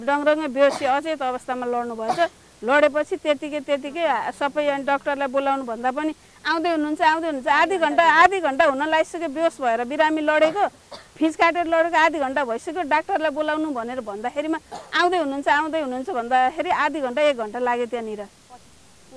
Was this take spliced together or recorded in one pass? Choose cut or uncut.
uncut